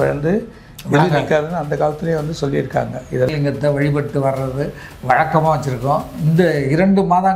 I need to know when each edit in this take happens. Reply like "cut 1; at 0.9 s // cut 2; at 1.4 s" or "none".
cut 1; at 3.3 s